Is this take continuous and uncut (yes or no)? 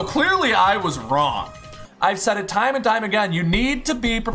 no